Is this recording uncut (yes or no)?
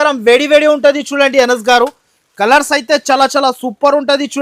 yes